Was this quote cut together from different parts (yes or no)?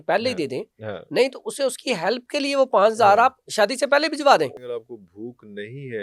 yes